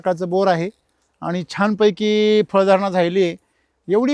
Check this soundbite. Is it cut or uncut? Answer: uncut